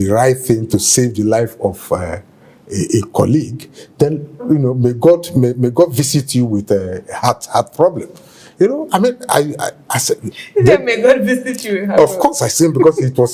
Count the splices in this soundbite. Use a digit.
0